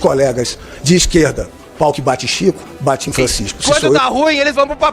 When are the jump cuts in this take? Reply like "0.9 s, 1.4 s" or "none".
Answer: 4.0 s